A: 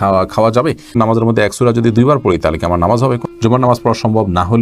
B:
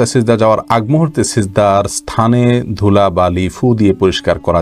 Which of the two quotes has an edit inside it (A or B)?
A